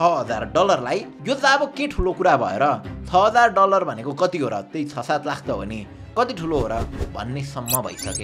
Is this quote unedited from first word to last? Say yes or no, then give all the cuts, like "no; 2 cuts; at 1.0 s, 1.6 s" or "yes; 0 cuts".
yes; 0 cuts